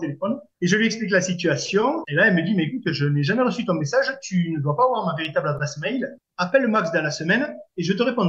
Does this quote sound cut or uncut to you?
cut